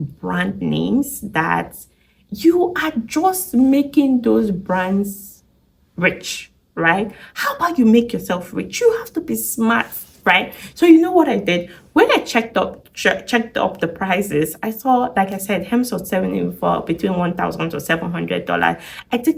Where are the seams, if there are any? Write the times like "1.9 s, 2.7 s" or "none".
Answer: none